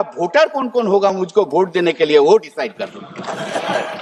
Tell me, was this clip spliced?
no; 0 cuts

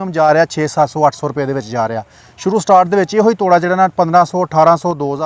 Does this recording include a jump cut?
no; 0 cuts

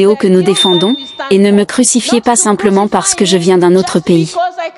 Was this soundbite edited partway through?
yes; 1 cut; at 1.1 s

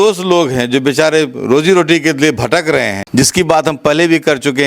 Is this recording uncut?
no; 1 cut; at 3.0 s

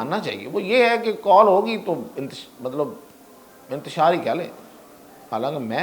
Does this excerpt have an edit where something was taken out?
no; 0 cuts

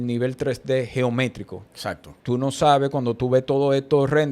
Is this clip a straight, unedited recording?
no; 1 cut; at 2.1 s

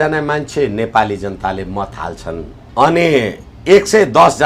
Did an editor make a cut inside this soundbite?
yes; 1 cut; at 2.6 s

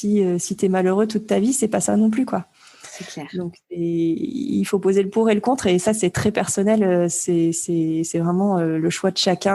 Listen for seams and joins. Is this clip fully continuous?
yes; 0 cuts

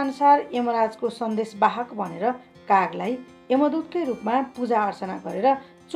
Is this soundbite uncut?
yes; 0 cuts

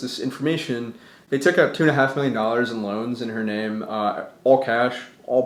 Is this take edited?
no; 0 cuts

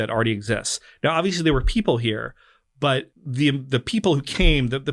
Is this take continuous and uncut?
no; 1 cut; at 3.2 s

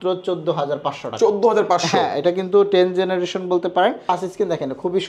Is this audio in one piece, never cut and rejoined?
no; 1 cut; at 4.1 s

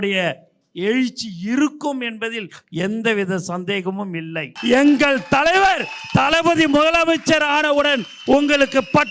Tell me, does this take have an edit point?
yes; 1 cut; at 4.5 s

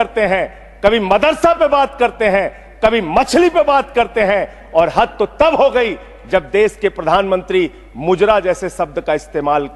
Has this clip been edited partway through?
no; 0 cuts

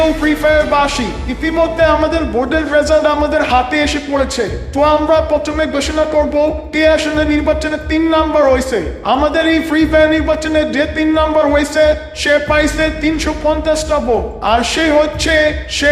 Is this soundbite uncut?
yes; 0 cuts

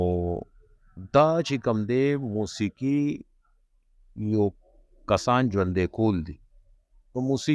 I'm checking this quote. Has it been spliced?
no; 0 cuts

